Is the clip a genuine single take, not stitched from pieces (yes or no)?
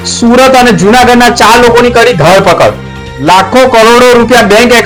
yes